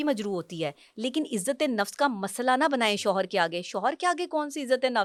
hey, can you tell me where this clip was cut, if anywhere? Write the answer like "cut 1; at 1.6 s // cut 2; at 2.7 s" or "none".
none